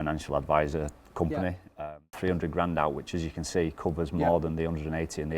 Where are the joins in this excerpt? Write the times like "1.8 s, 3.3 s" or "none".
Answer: 1.7 s